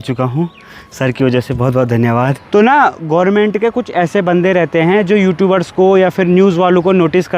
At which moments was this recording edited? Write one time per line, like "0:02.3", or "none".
0:02.4